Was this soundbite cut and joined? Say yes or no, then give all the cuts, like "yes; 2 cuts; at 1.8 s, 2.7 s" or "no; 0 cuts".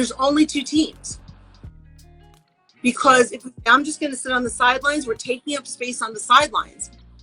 yes; 2 cuts; at 1.0 s, 2.4 s